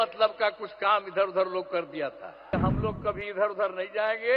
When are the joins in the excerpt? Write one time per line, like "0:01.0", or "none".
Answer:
0:02.5